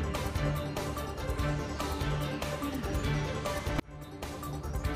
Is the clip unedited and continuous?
no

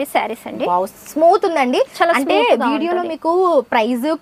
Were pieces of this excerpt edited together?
no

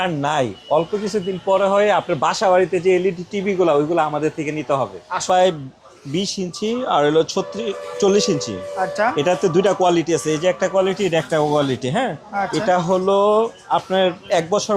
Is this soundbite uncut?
no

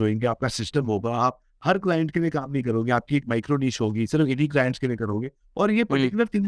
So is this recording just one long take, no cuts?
yes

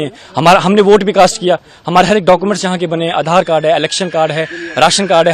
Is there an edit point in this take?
no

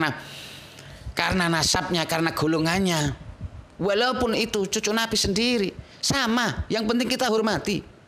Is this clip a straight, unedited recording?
yes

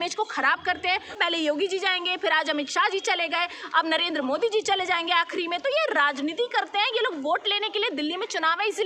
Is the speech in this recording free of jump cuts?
no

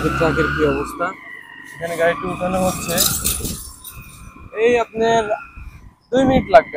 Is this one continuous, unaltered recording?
yes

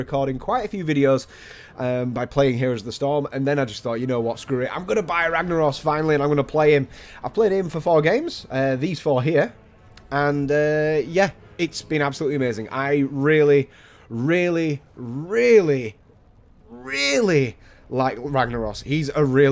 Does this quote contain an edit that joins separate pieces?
yes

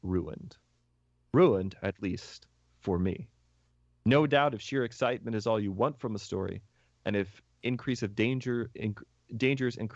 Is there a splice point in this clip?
no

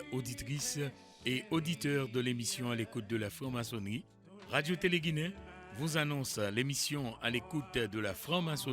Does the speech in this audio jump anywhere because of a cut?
no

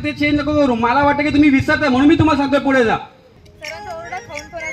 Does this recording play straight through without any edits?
yes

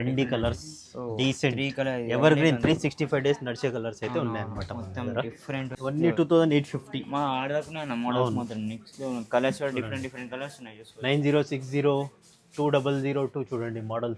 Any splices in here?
yes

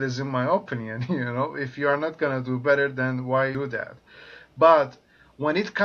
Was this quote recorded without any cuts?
no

